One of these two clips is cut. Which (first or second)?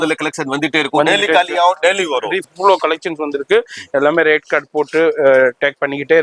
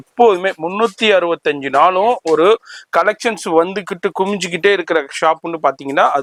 first